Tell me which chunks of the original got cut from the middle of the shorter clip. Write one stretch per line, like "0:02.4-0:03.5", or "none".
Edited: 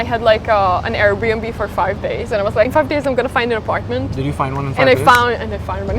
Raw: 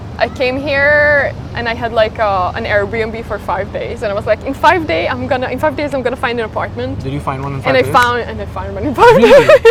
0:04.4-0:05.6